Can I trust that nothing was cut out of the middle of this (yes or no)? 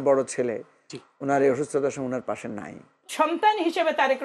no